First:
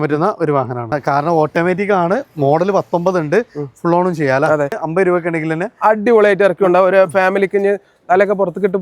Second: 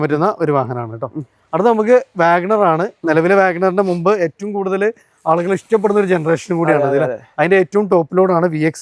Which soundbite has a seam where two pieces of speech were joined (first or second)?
first